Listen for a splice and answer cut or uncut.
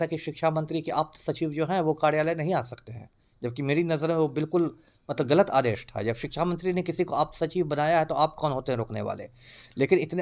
uncut